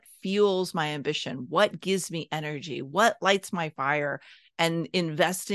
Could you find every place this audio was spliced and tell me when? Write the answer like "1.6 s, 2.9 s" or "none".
none